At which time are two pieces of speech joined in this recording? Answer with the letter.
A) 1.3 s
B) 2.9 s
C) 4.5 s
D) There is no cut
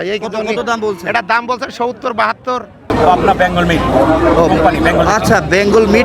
B